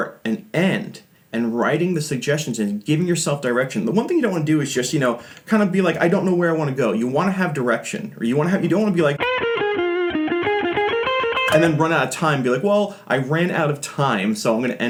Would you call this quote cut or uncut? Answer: uncut